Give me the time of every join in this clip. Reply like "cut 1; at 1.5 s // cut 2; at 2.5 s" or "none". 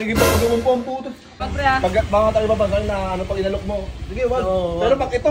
cut 1; at 1.5 s